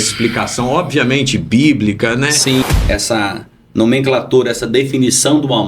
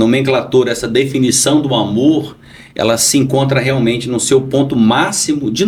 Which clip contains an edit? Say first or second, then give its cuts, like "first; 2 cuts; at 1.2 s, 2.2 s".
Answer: first; 1 cut; at 2.6 s